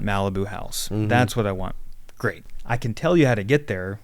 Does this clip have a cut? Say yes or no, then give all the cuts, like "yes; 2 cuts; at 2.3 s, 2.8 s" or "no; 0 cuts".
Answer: yes; 1 cut; at 2.5 s